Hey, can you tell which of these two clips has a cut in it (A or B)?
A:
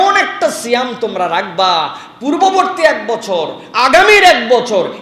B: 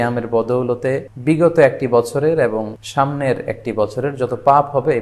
B